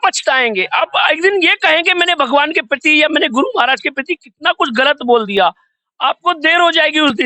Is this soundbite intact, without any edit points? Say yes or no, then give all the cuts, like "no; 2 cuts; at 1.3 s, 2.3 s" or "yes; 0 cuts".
yes; 0 cuts